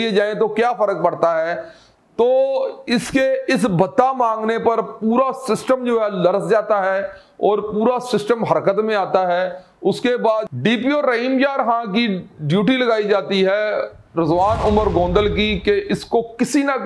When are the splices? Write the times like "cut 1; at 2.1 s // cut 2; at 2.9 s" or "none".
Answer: none